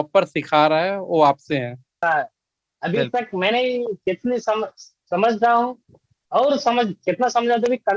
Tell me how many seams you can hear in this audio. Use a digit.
1